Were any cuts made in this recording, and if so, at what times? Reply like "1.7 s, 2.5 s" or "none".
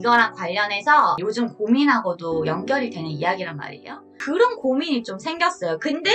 4.1 s